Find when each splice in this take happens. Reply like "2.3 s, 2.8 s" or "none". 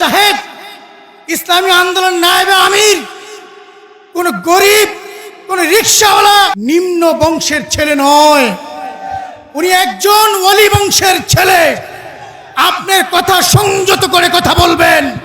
6.6 s